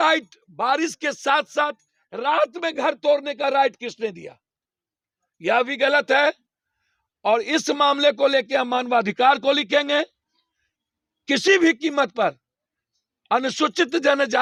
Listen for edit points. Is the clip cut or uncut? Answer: uncut